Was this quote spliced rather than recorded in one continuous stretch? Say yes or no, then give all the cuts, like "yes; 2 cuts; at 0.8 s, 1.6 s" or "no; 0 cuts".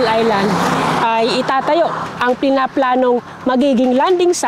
no; 0 cuts